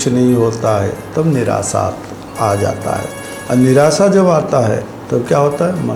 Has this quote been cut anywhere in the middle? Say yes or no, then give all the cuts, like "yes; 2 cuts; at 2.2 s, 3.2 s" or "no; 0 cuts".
no; 0 cuts